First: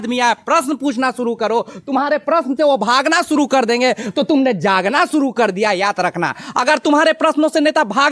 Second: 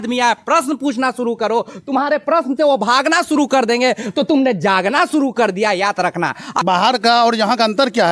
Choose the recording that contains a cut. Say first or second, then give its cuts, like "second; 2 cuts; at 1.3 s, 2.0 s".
second; 1 cut; at 6.5 s